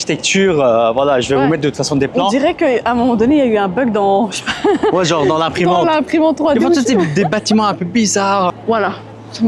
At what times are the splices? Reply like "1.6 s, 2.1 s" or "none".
8.5 s